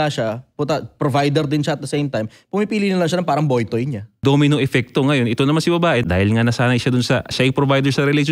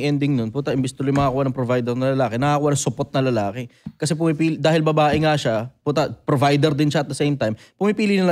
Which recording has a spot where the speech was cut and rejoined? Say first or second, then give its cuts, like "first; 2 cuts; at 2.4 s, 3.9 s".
first; 2 cuts; at 4.2 s, 6.0 s